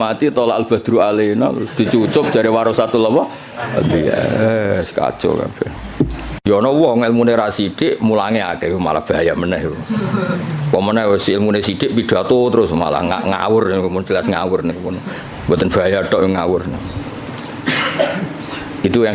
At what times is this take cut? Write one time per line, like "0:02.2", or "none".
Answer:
0:06.3